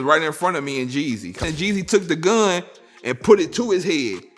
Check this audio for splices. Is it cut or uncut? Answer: cut